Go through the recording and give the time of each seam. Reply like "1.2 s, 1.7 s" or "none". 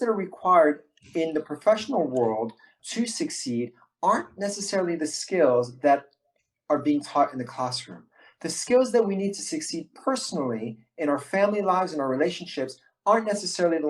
2.8 s